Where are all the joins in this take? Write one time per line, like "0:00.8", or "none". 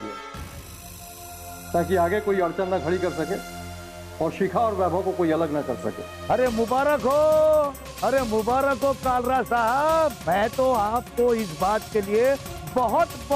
none

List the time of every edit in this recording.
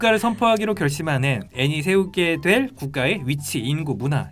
0:01.5

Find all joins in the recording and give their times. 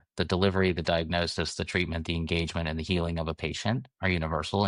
none

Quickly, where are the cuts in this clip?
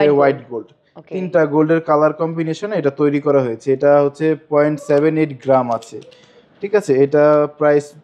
none

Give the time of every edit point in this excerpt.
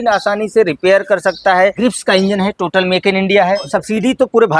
0:01.8
0:03.7

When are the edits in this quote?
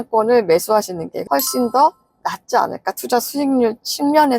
0:01.1

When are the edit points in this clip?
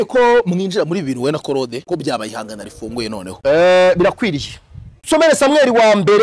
0:01.8
0:03.3
0:05.0

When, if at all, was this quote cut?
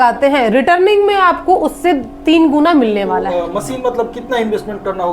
0:03.3

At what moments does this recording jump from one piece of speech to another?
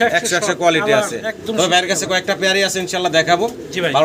none

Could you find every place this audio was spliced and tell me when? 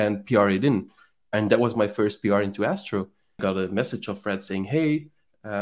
0:03.4

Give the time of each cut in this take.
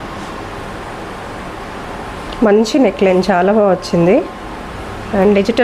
none

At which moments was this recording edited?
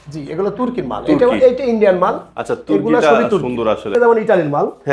0:03.9

